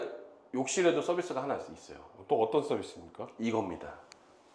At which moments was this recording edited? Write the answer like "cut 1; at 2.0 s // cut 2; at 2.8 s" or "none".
none